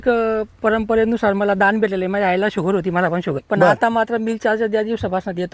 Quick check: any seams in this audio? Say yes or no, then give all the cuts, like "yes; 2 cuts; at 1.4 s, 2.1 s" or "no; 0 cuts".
yes; 1 cut; at 3.4 s